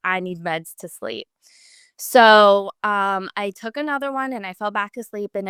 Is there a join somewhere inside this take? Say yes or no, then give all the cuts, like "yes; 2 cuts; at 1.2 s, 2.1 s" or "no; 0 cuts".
no; 0 cuts